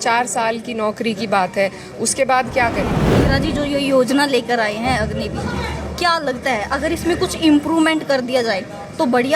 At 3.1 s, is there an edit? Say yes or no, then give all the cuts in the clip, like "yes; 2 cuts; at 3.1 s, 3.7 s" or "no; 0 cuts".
yes; 1 cut; at 3.1 s